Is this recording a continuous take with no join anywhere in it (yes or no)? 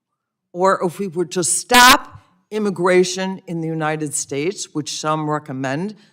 yes